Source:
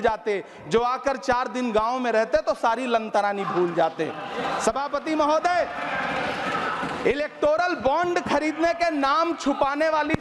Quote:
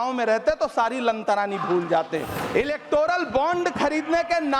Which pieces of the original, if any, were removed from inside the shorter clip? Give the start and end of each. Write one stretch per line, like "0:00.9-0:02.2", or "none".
0:04.2-0:06.9